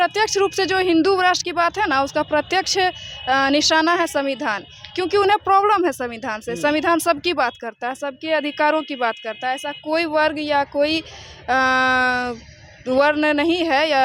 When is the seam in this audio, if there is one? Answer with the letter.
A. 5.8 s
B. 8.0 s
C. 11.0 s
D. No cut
D